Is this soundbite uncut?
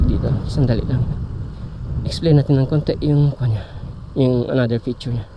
yes; 0 cuts

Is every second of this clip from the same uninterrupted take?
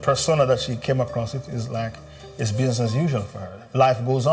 yes; 0 cuts

